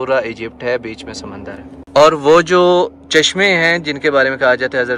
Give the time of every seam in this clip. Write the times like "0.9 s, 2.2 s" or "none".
none